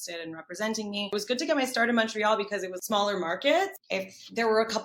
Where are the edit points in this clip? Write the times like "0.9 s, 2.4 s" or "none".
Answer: 1.1 s, 2.7 s, 3.8 s